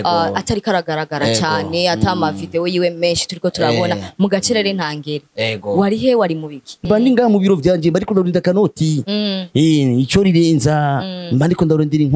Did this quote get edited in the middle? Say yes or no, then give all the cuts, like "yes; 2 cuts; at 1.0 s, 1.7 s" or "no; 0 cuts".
yes; 1 cut; at 6.8 s